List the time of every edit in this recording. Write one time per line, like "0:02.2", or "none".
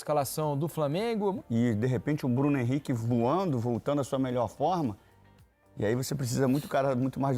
0:01.4